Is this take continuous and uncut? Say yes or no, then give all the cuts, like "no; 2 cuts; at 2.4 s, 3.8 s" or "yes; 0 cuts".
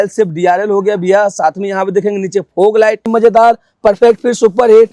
no; 1 cut; at 3.0 s